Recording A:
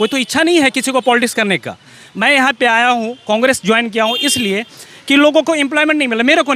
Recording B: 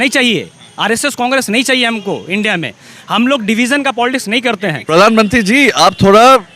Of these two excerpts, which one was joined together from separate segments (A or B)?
B